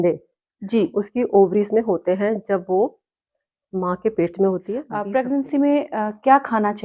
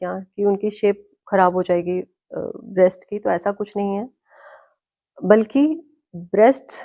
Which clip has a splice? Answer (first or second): first